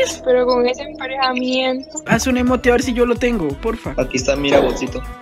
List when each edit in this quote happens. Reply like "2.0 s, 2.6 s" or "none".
2.1 s